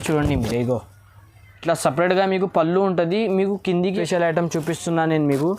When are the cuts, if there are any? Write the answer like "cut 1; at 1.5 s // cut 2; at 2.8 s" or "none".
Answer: cut 1; at 4.0 s

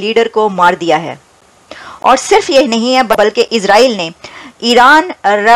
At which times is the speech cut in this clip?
cut 1; at 3.1 s

